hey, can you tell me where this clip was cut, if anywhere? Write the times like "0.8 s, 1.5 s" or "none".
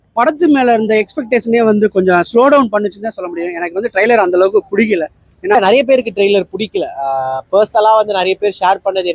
5.5 s